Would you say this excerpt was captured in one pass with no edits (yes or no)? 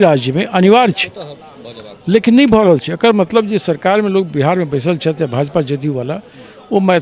yes